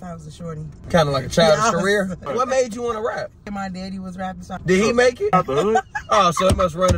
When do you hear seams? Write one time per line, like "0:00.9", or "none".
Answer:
0:00.8
0:02.2
0:03.5
0:04.6
0:05.3